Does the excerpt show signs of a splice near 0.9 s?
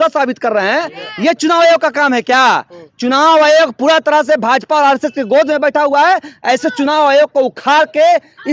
no; 0 cuts

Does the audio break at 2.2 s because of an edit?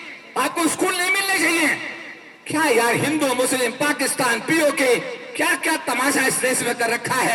no; 0 cuts

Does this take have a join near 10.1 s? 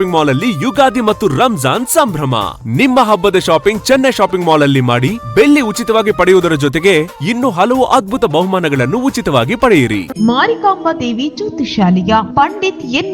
yes; 1 cut; at 10.1 s

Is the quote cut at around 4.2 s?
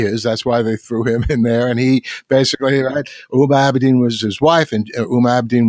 yes; 1 cut; at 4.2 s

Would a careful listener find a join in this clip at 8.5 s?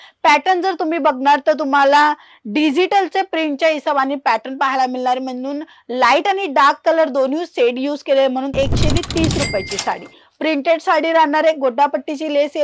yes; 1 cut; at 8.5 s

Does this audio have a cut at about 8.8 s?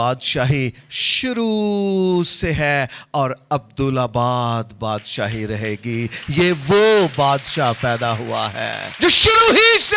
yes; 1 cut; at 8.8 s

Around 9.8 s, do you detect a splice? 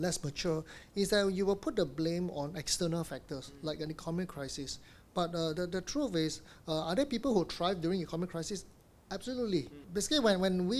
yes; 1 cut; at 9.8 s

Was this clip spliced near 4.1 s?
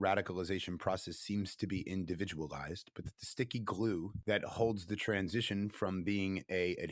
yes; 1 cut; at 4.1 s

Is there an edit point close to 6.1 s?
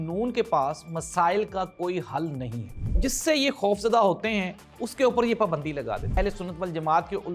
yes; 2 cuts; at 3.0 s, 6.1 s

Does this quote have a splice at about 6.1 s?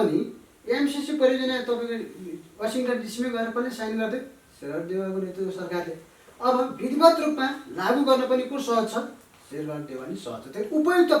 no; 0 cuts

